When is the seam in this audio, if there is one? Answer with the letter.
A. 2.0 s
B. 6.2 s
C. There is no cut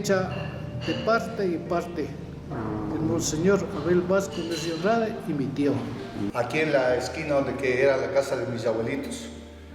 B